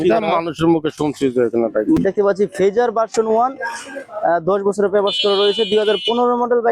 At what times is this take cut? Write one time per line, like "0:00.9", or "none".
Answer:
0:02.0